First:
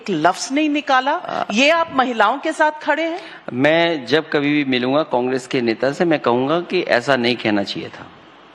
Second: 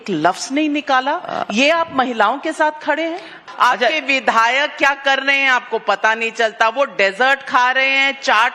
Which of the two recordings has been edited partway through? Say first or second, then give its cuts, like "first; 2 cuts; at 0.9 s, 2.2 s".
second; 1 cut; at 3.4 s